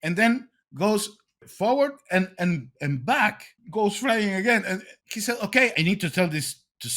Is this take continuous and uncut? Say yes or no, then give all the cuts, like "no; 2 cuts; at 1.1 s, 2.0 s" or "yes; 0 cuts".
no; 3 cuts; at 3.5 s, 5.0 s, 5.7 s